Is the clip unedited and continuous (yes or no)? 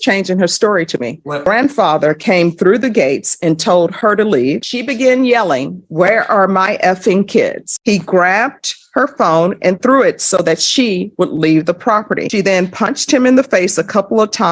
no